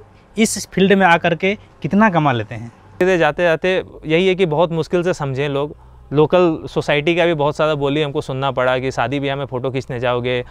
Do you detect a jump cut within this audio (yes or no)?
yes